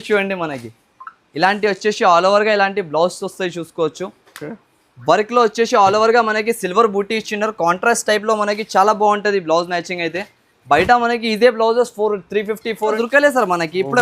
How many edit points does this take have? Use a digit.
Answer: 1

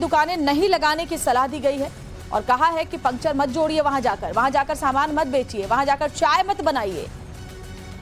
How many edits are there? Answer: 1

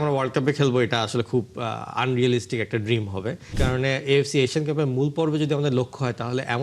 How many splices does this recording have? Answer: 1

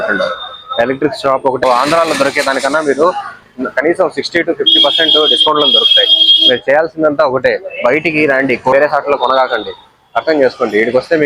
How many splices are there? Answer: 2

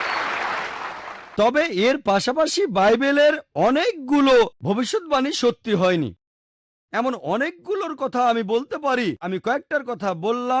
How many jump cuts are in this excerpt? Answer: 2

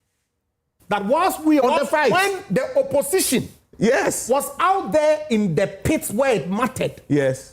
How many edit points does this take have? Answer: 1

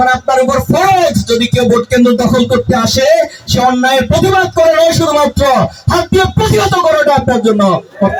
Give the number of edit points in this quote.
0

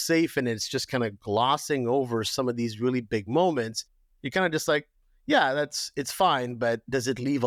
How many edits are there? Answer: 0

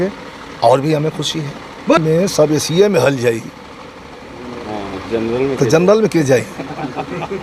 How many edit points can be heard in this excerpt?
1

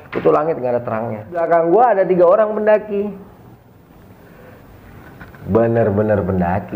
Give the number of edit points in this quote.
1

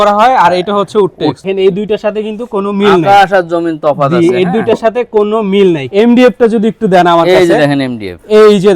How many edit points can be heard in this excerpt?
2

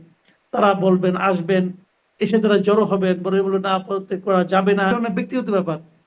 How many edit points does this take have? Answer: 1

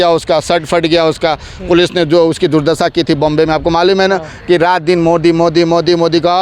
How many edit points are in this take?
0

